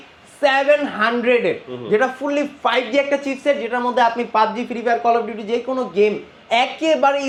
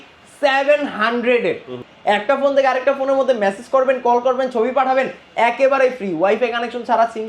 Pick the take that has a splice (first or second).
second